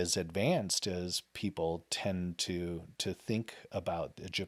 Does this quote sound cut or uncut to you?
uncut